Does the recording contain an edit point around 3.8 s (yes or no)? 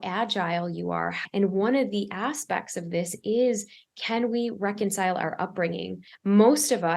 no